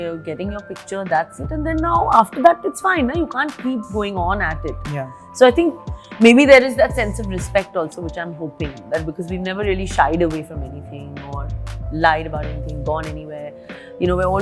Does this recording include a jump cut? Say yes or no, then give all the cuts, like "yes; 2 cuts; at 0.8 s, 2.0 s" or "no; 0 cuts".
no; 0 cuts